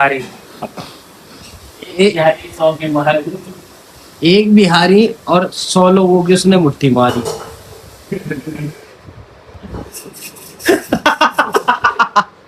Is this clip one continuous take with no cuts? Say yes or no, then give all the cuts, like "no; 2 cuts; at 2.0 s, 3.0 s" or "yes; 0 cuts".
yes; 0 cuts